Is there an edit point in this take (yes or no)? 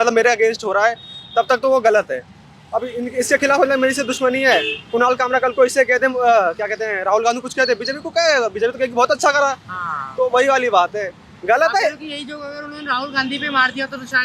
no